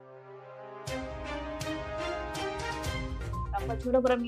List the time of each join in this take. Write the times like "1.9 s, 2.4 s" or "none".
3.1 s